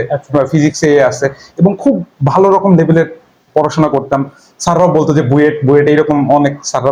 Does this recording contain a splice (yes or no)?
no